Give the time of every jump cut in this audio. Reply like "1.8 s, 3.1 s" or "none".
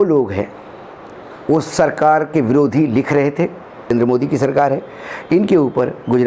3.9 s